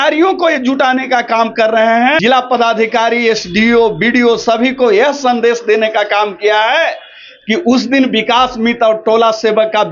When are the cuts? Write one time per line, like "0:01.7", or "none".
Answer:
0:02.2